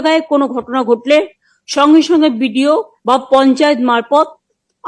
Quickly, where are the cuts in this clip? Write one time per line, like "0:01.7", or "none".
0:02.9